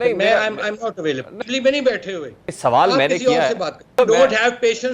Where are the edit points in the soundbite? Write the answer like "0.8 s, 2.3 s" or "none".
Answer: 1.4 s, 2.4 s, 3.9 s